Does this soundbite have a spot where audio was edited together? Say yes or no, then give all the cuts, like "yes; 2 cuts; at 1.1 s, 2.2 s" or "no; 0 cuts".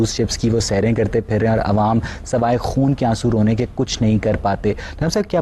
no; 0 cuts